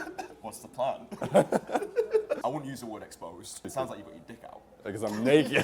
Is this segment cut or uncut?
cut